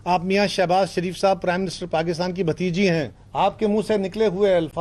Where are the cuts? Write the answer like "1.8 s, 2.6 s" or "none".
3.2 s